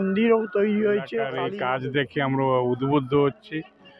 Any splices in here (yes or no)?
yes